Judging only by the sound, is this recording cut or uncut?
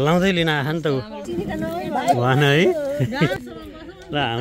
cut